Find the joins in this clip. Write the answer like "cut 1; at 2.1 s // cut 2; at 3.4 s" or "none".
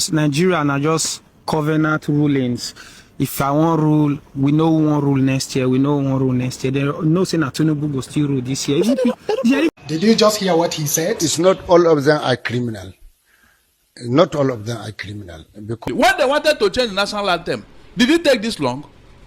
cut 1; at 9.7 s // cut 2; at 15.8 s